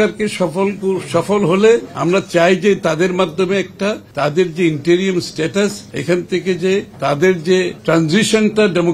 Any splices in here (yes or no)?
yes